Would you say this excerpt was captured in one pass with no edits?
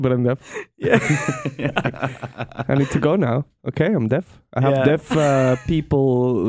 yes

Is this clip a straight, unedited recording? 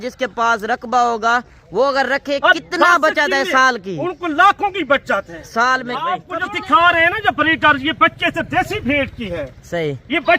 no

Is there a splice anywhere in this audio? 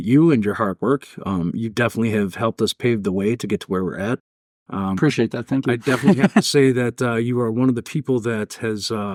no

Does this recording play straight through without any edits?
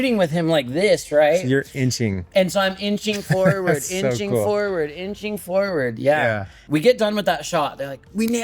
no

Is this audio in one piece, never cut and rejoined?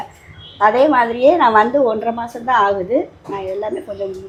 yes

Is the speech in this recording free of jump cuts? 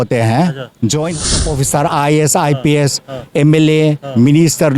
no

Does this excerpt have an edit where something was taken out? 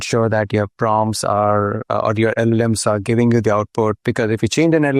no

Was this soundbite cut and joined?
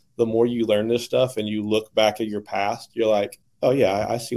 yes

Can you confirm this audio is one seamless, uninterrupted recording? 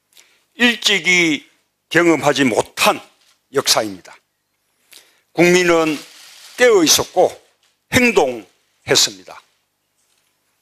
no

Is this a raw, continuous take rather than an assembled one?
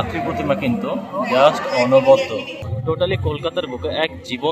no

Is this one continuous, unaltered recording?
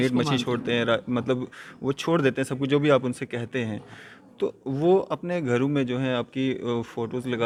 yes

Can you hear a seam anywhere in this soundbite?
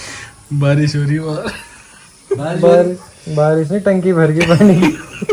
no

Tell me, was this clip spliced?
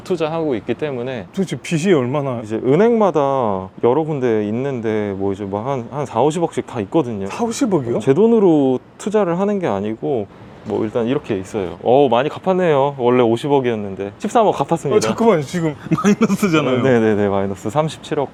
no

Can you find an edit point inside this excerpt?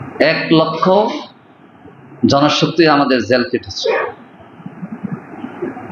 no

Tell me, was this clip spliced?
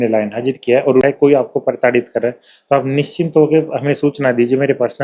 yes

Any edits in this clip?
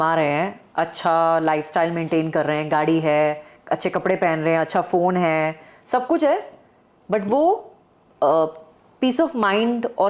no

